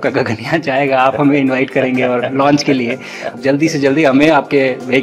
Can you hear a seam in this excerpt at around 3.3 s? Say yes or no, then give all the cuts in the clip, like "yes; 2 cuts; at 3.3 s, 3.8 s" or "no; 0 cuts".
yes; 1 cut; at 3.3 s